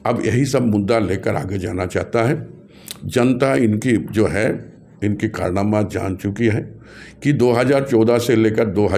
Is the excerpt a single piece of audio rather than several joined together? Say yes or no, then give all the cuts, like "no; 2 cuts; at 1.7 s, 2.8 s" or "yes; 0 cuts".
yes; 0 cuts